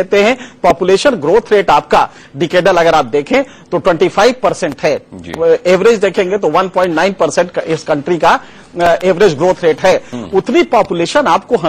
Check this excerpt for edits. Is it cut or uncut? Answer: cut